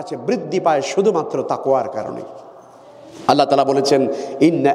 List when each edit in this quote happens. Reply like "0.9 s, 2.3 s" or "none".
none